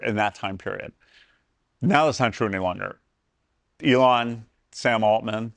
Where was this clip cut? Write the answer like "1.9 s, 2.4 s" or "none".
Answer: none